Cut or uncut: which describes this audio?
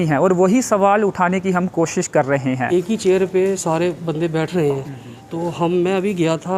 cut